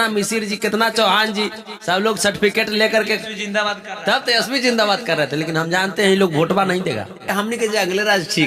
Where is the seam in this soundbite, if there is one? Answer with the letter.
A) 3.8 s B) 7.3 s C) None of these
B